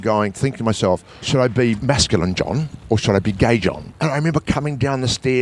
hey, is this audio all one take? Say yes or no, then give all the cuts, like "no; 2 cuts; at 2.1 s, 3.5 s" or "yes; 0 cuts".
no; 3 cuts; at 1.1 s, 1.8 s, 3.8 s